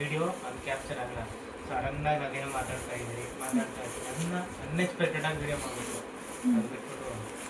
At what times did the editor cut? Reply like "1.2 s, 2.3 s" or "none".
none